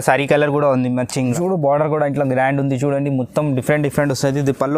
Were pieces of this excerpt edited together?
yes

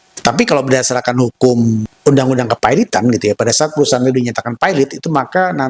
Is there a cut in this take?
yes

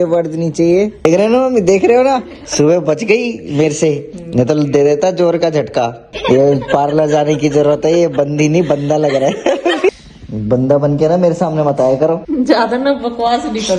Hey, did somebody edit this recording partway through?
yes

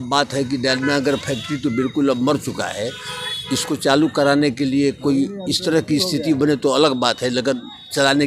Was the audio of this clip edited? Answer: no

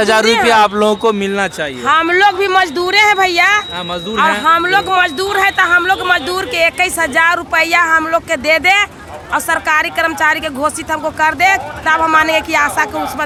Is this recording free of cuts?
yes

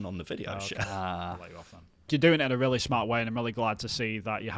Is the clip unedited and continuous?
no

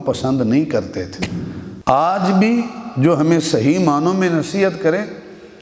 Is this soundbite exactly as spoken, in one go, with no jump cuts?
yes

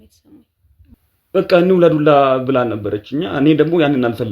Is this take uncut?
no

